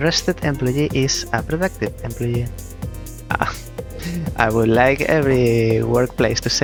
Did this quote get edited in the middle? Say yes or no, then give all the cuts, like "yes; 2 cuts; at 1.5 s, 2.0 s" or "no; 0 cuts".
no; 0 cuts